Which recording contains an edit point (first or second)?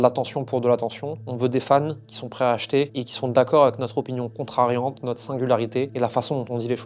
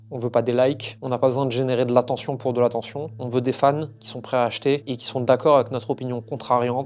first